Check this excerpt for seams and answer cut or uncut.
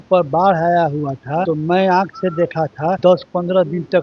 cut